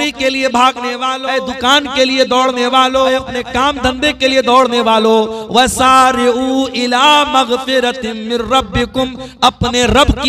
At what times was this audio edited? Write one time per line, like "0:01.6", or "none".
0:01.2
0:03.3